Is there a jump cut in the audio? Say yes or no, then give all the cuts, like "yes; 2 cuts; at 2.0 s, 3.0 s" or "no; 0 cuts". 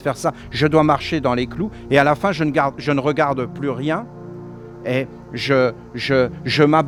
no; 0 cuts